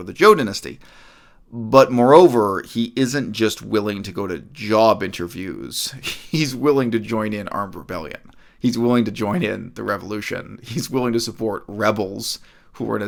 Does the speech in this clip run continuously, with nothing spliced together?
yes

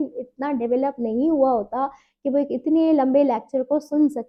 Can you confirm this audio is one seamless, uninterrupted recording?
yes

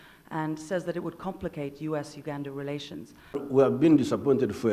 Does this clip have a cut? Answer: yes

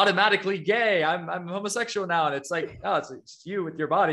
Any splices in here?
no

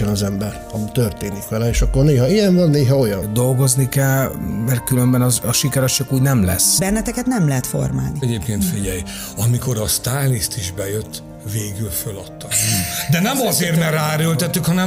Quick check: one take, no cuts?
no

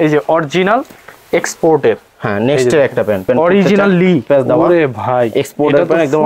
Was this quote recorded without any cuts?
no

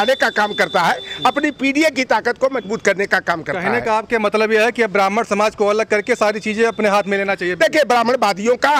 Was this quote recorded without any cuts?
yes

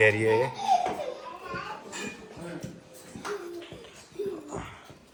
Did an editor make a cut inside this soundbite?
no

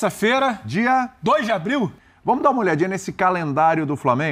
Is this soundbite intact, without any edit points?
no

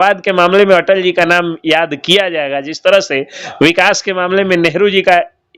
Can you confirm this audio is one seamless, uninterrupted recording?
yes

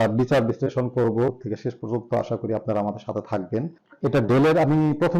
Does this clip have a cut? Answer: yes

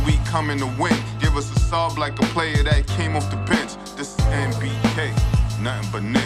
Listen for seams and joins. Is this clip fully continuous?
yes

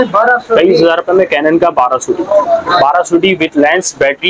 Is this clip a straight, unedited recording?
yes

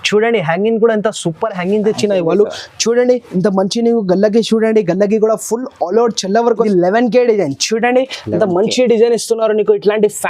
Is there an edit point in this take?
yes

